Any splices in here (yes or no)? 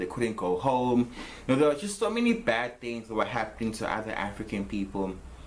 yes